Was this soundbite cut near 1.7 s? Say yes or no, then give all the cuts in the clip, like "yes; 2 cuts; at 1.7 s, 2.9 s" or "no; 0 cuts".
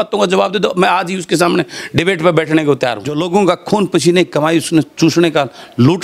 no; 1 cut; at 3.1 s